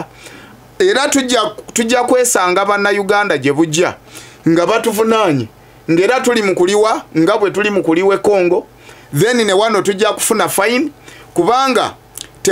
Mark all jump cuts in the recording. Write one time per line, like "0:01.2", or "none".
none